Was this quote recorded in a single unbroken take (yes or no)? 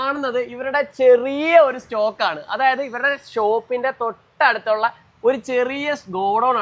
yes